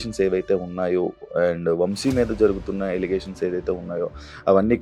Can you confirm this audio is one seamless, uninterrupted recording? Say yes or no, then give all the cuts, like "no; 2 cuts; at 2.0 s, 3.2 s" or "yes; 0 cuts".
yes; 0 cuts